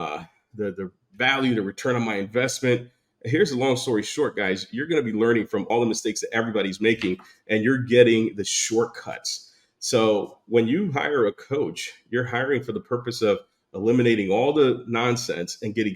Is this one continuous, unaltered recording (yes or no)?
no